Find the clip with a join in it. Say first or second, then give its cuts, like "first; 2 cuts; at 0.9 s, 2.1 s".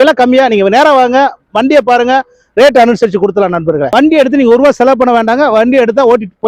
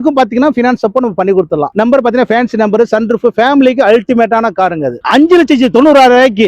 first; 1 cut; at 3.9 s